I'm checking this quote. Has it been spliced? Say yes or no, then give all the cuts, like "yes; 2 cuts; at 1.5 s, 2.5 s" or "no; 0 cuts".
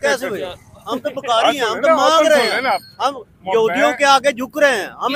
no; 0 cuts